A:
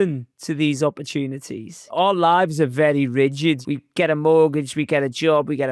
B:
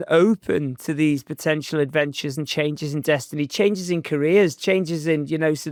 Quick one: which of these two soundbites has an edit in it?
A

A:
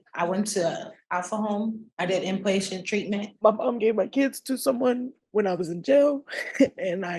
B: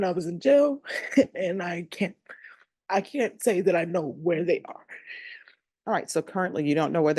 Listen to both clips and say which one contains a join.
A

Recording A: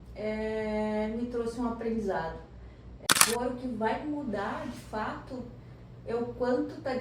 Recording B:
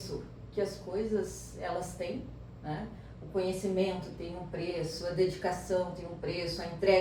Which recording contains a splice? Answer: A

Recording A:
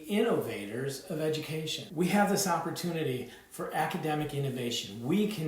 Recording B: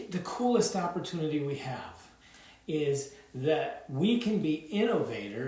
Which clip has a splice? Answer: A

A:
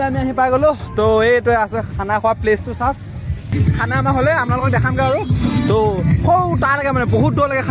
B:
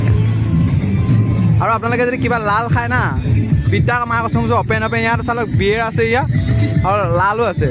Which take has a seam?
A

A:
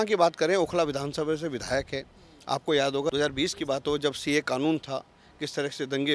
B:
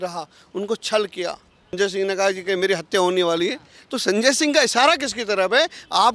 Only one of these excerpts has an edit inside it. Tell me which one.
B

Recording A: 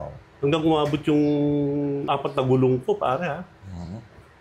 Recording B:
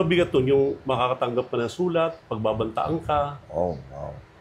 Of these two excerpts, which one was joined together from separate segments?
A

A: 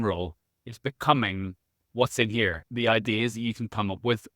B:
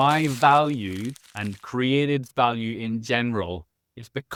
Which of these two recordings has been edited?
A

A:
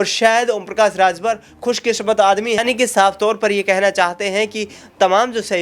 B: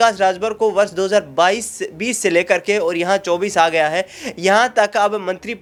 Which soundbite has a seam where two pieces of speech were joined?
A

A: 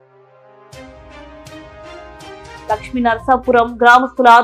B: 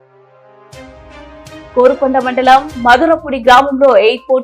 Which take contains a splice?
B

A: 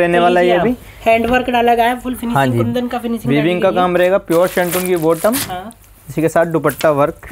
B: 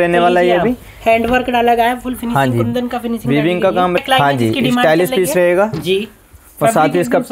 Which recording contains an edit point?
B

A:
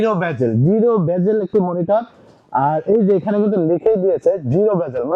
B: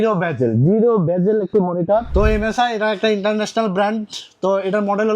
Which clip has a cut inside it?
B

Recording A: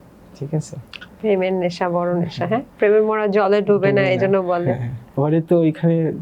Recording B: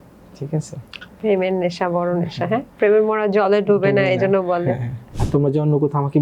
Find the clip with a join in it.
B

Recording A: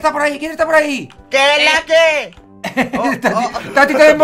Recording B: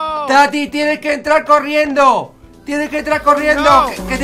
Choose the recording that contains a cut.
A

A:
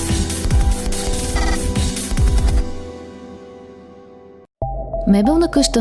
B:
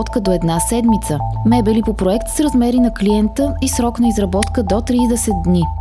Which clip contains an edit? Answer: A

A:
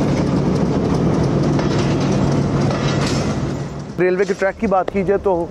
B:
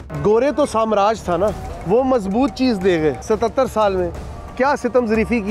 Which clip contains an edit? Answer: B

